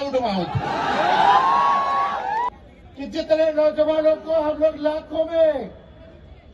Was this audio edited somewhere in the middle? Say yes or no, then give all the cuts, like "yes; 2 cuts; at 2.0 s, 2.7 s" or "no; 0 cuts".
yes; 1 cut; at 2.5 s